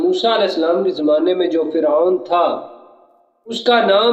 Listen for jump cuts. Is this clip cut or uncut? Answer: uncut